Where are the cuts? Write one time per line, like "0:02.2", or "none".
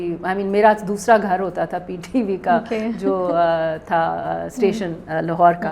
none